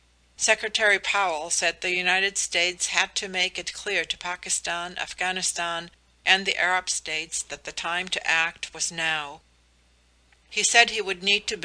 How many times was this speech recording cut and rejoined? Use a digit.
0